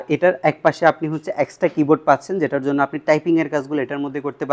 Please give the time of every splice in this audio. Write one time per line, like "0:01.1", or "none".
none

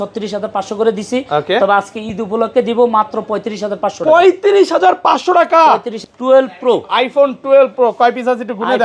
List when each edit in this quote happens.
0:05.9

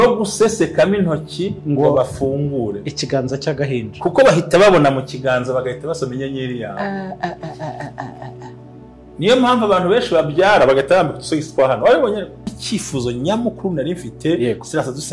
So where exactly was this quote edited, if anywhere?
0:12.5

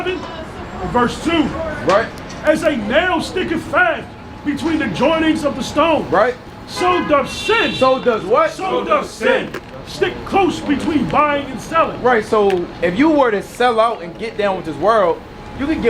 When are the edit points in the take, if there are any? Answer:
0:05.5

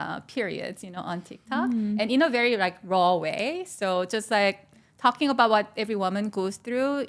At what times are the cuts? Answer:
none

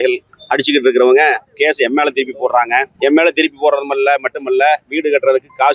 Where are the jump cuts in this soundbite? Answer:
none

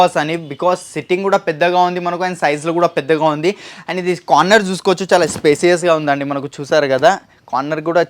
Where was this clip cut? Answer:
none

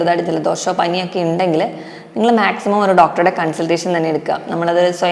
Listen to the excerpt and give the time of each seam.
none

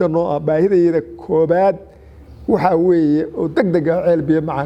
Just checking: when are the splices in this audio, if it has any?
none

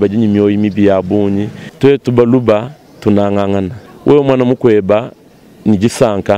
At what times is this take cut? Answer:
0:01.6
0:03.8

